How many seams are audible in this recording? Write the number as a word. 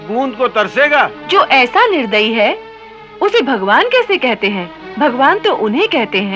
two